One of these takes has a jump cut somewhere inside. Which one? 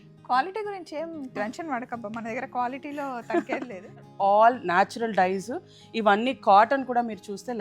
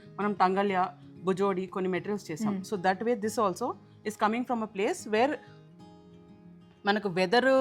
first; 1 cut; at 4.1 s

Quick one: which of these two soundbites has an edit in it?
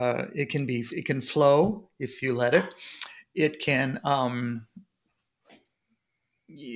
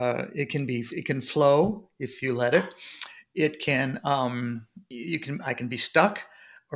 second; 1 cut; at 4.8 s

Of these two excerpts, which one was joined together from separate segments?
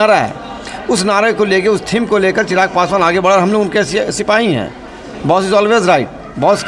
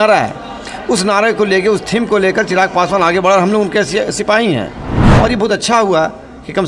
second; 1 cut; at 5.0 s

